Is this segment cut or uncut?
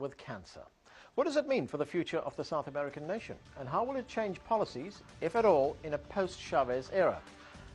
uncut